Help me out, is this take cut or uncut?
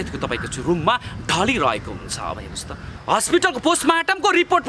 cut